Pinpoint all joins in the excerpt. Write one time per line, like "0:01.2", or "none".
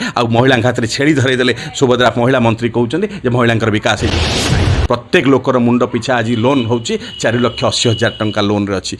0:04.4